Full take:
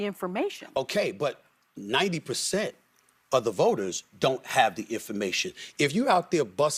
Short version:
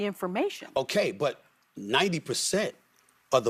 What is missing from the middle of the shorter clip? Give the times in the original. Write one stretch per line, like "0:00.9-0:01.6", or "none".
none